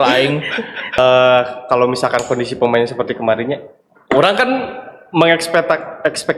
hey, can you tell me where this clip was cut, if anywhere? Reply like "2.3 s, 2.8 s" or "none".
1.0 s